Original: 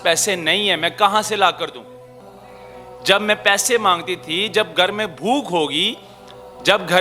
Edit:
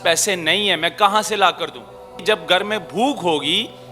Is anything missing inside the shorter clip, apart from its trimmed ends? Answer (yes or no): yes